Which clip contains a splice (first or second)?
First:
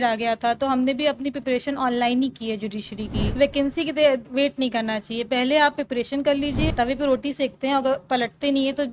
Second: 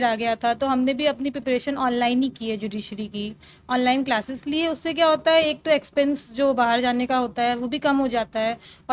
first